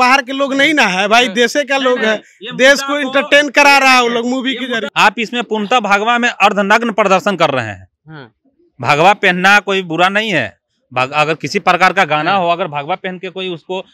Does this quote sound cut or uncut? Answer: cut